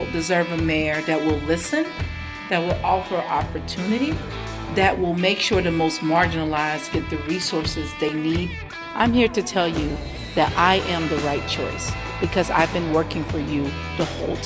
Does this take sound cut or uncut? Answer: uncut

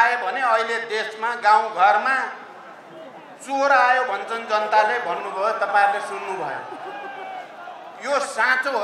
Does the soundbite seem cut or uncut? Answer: uncut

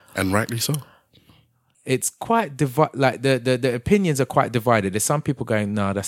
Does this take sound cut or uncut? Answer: cut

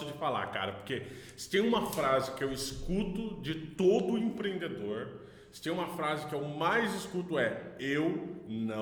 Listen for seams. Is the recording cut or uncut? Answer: uncut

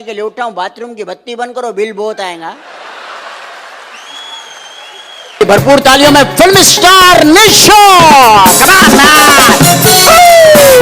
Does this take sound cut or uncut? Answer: cut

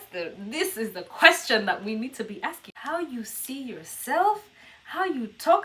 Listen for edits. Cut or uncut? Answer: cut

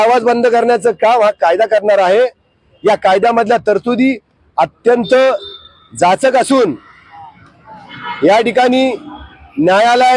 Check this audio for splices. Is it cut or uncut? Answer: uncut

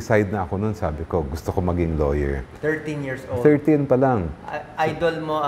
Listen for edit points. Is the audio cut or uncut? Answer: uncut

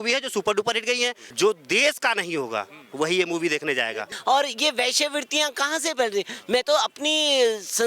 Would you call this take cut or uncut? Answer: cut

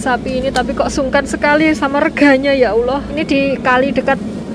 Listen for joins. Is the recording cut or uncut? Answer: cut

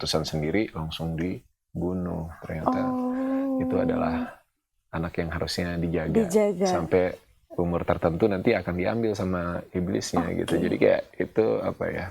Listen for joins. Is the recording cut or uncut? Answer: uncut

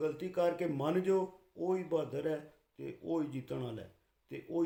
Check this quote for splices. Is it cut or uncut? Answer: uncut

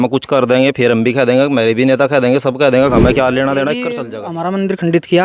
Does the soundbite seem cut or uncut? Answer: cut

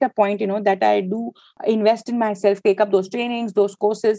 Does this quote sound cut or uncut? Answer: cut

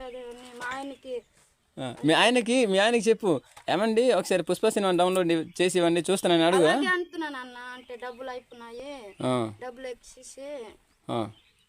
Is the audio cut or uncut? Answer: uncut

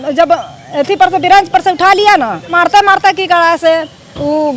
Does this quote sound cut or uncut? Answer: cut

